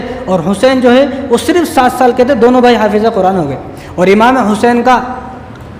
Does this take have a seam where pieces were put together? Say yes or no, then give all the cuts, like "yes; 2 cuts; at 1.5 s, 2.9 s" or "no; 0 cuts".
no; 0 cuts